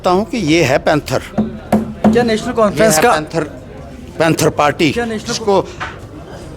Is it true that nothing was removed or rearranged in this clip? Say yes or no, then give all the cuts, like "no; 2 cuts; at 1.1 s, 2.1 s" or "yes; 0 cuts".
yes; 0 cuts